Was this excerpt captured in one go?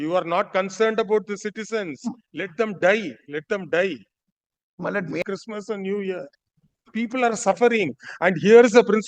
no; 1 cut; at 5.2 s

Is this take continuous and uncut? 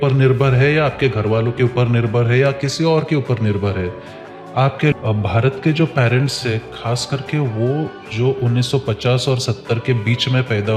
no; 1 cut; at 4.9 s

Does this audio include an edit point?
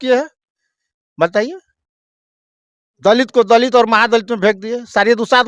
no; 0 cuts

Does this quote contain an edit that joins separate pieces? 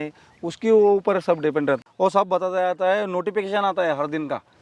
yes; 1 cut; at 1.8 s

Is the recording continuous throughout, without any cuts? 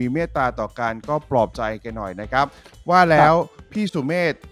no; 1 cut; at 2.7 s

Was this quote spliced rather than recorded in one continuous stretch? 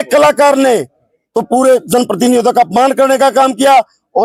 no; 0 cuts

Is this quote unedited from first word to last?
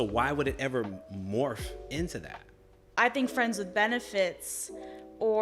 no; 1 cut; at 3.0 s

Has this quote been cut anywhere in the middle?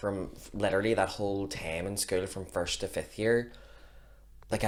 no; 0 cuts

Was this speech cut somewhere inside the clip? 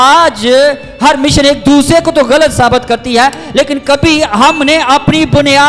no; 0 cuts

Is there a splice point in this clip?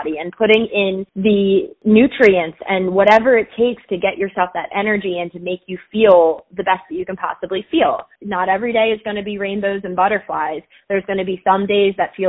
yes; 3 cuts; at 1.1 s, 1.7 s, 8.1 s

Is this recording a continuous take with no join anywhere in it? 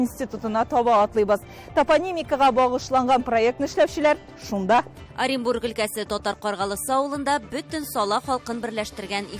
no; 1 cut; at 5.0 s

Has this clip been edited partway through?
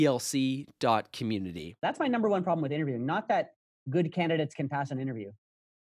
yes; 1 cut; at 1.7 s

